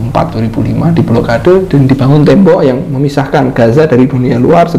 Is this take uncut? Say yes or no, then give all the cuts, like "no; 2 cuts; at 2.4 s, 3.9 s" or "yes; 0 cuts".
yes; 0 cuts